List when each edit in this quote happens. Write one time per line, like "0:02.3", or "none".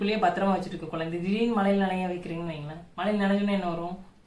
none